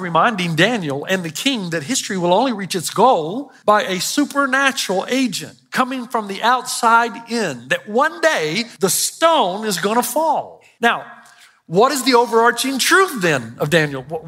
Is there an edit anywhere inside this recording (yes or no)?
yes